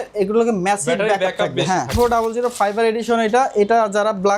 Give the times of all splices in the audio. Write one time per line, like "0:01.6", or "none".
0:01.9